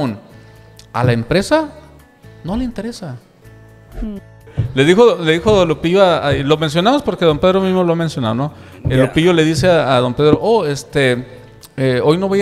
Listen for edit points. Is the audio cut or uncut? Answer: cut